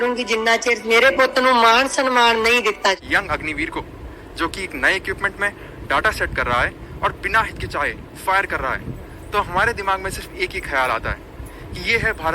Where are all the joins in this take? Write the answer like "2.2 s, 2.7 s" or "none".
2.7 s